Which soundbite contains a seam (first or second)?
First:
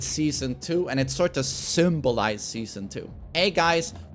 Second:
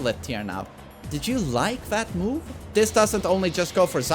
second